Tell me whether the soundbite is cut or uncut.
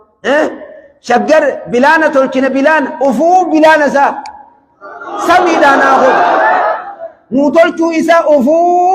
uncut